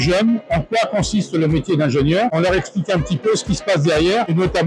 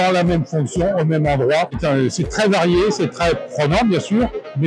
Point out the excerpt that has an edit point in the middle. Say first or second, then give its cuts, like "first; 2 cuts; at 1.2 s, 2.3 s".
first; 1 cut; at 2.3 s